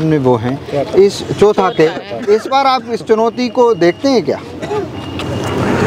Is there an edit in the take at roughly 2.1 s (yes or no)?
no